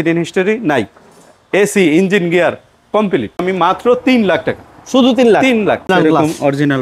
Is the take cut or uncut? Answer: cut